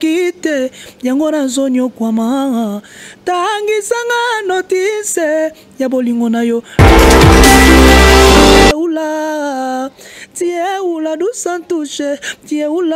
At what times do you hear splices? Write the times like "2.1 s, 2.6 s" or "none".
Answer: 6.7 s, 8.7 s